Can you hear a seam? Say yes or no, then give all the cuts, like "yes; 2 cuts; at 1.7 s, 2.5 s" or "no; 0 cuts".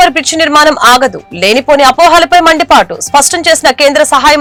no; 0 cuts